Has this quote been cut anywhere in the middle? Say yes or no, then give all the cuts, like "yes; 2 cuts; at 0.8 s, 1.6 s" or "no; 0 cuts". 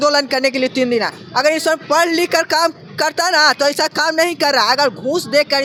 no; 0 cuts